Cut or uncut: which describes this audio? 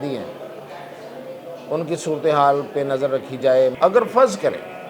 cut